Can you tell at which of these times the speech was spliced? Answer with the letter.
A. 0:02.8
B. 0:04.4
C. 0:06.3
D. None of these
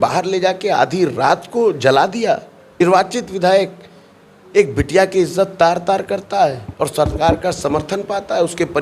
A